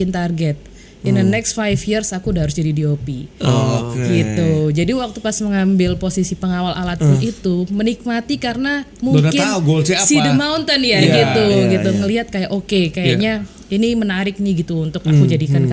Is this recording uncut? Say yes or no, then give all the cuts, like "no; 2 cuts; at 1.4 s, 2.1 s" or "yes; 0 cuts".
yes; 0 cuts